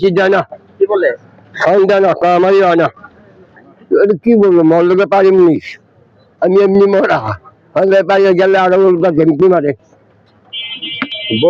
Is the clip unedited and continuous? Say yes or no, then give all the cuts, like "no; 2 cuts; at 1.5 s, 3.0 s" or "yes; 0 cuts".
yes; 0 cuts